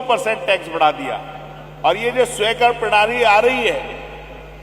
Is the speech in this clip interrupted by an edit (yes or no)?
no